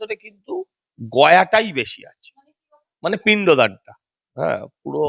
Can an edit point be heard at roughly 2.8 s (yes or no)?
no